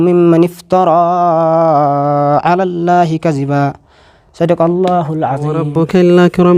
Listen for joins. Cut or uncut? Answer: cut